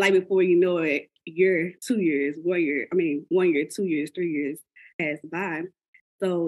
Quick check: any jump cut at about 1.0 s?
no; 1 cut; at 5.0 s

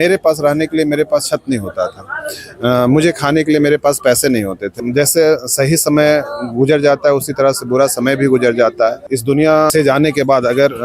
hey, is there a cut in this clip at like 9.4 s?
yes; 2 cuts; at 4.8 s, 9.4 s

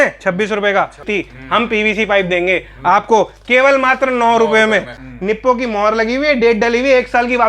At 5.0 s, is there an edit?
yes; 2 cuts; at 1.0 s, 5.0 s

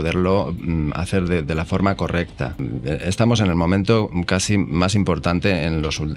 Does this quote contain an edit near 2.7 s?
yes; 1 cut; at 2.7 s

